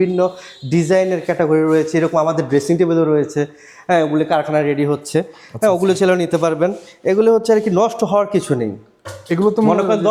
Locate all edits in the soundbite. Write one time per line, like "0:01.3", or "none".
none